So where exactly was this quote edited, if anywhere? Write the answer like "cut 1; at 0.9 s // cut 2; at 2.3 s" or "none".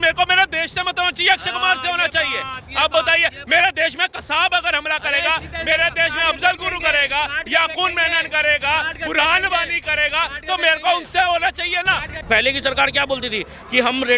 cut 1; at 12.1 s